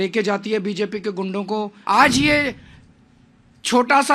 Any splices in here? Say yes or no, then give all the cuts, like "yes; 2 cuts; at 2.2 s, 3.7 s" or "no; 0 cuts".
yes; 1 cut; at 1.8 s